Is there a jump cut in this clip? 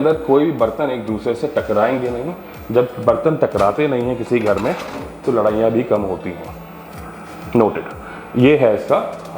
no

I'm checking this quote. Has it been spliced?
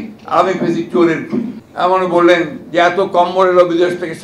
yes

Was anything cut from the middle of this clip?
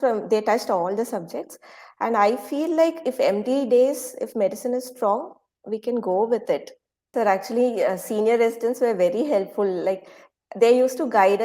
yes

